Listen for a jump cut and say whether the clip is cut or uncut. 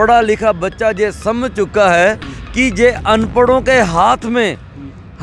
uncut